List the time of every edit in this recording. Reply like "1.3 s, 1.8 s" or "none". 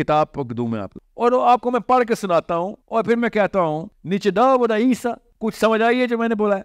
0.9 s, 2.8 s, 3.9 s, 5.3 s